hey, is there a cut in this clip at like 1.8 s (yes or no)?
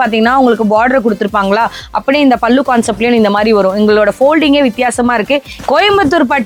no